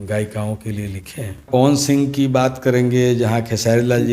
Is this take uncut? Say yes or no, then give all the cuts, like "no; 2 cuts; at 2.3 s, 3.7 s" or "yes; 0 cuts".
no; 1 cut; at 1.5 s